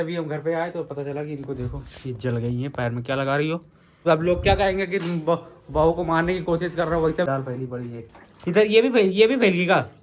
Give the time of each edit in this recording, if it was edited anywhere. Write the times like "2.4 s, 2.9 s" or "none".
4.0 s, 7.3 s